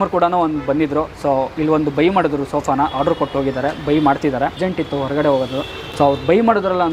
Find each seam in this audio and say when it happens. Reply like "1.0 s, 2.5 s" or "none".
none